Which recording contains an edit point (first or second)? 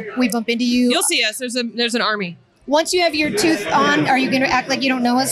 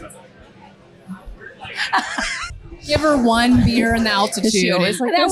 second